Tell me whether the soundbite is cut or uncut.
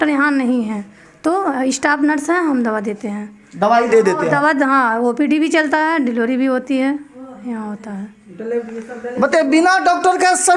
uncut